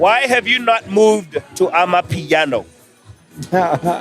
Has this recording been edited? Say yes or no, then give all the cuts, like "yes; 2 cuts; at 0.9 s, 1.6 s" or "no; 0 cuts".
yes; 1 cut; at 1.4 s